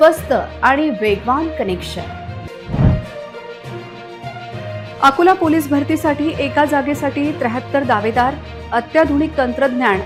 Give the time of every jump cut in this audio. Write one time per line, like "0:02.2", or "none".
none